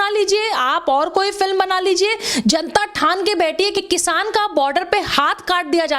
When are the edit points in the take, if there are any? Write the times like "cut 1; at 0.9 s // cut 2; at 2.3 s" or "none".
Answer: cut 1; at 3.8 s

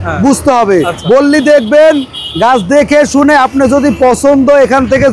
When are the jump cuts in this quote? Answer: cut 1; at 0.9 s

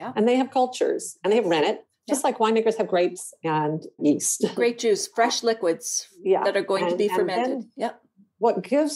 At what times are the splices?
cut 1; at 1.8 s // cut 2; at 4.0 s

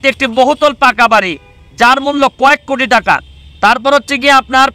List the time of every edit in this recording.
none

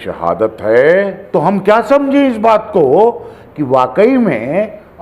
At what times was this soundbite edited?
cut 1; at 1.2 s

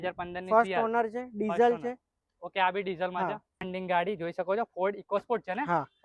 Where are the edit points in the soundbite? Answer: cut 1; at 3.5 s

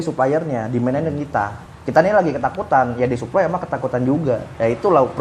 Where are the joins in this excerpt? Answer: none

